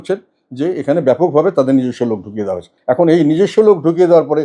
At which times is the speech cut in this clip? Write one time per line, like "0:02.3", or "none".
0:02.7